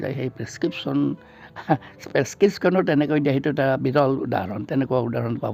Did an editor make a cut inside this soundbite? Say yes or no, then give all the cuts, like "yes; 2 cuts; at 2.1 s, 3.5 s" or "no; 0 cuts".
no; 0 cuts